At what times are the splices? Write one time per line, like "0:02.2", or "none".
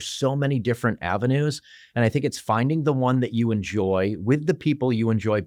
none